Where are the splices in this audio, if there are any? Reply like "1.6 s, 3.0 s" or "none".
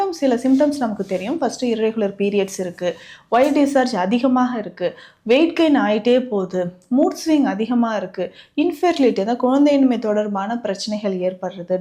none